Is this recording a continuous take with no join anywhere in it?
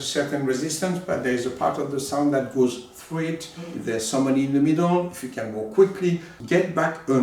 no; 2 cuts; at 3.8 s, 6.3 s

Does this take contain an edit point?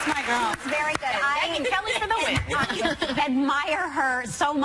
yes; 1 cut; at 3.1 s

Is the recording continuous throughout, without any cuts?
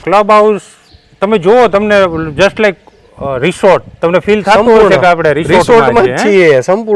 yes; 0 cuts

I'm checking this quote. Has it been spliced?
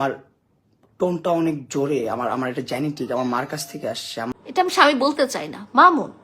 yes; 1 cut; at 4.3 s

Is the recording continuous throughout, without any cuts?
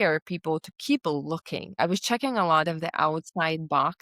no; 1 cut; at 1.7 s

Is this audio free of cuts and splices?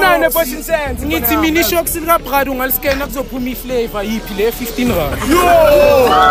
yes; 0 cuts

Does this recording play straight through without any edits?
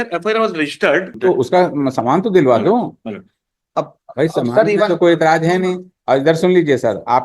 no; 1 cut; at 1.1 s

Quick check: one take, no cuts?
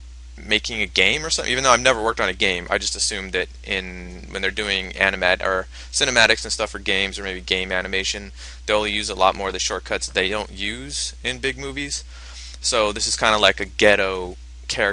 yes; 0 cuts

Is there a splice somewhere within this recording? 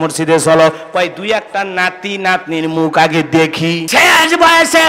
yes; 1 cut; at 3.8 s

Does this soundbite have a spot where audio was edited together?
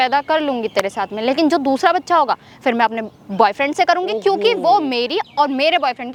no; 0 cuts

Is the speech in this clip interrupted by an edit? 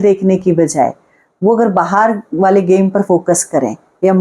no; 0 cuts

